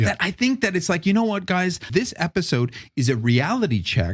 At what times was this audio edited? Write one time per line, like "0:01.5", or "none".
0:01.9